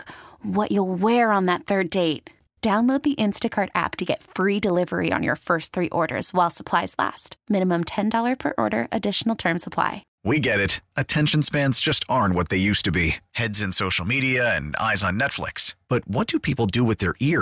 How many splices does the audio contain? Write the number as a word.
one